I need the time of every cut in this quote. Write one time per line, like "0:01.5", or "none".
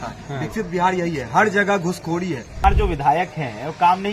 0:02.6